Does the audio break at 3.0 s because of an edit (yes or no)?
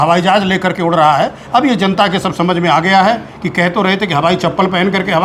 no